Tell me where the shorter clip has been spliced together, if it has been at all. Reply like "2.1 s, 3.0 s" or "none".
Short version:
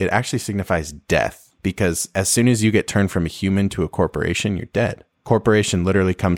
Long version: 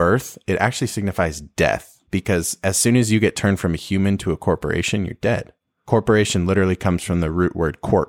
5.1 s